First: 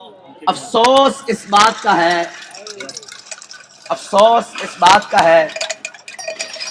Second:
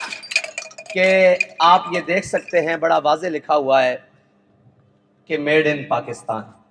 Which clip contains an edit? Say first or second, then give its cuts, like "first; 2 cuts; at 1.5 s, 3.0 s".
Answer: first; 1 cut; at 2.7 s